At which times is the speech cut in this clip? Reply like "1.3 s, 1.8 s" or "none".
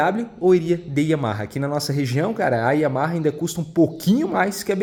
none